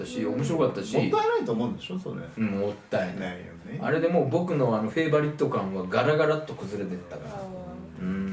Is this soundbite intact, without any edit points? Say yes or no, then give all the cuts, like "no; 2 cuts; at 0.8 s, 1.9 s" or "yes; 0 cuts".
yes; 0 cuts